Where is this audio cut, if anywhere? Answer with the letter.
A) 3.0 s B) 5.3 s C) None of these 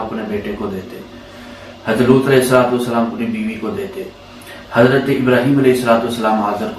C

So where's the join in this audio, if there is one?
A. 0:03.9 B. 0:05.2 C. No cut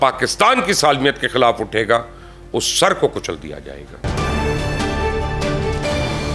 A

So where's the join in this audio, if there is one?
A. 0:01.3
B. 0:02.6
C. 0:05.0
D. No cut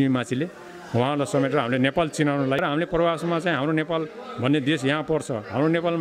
B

